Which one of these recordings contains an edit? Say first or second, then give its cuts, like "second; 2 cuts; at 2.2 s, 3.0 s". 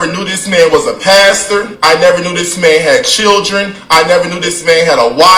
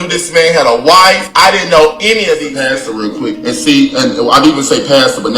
second; 1 cut; at 2.5 s